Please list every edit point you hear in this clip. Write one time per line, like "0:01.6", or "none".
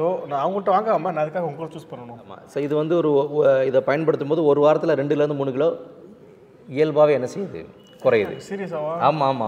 0:02.4

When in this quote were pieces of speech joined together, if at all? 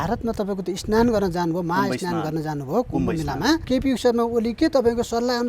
0:03.6

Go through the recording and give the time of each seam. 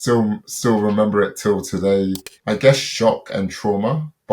0:02.3

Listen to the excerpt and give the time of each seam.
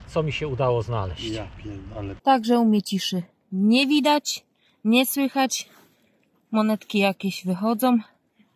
0:02.1

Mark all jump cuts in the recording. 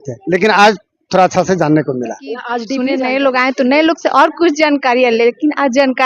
0:02.5

